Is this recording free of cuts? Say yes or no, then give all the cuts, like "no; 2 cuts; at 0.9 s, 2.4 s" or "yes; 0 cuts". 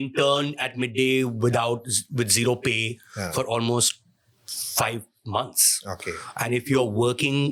yes; 0 cuts